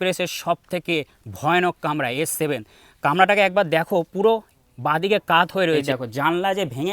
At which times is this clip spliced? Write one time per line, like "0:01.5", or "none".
0:05.8